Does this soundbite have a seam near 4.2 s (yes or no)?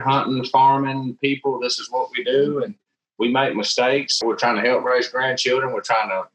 yes